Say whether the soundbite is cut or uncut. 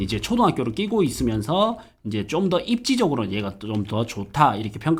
uncut